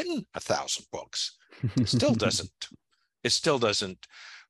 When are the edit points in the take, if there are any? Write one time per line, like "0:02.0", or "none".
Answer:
none